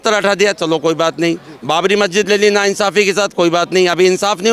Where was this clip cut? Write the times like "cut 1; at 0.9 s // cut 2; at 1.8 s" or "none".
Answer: none